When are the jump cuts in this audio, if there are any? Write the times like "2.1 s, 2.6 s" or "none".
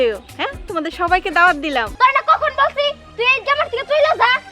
1.9 s